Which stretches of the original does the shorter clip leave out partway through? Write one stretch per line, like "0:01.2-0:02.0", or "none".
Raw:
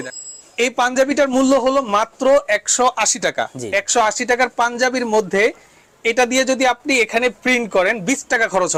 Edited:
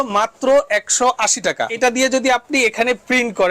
0:03.5-0:06.0